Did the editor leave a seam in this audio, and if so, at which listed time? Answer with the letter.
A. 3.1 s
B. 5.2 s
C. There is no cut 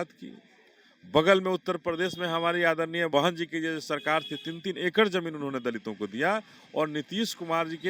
A